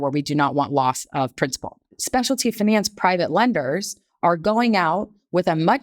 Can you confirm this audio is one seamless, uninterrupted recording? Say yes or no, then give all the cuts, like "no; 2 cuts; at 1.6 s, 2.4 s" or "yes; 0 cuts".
no; 1 cut; at 1.9 s